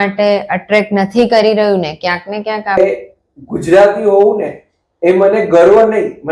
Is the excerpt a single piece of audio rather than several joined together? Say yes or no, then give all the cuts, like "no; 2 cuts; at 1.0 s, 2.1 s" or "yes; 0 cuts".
no; 1 cut; at 2.8 s